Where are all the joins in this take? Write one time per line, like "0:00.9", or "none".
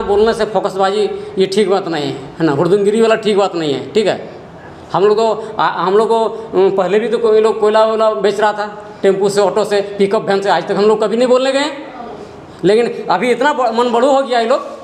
none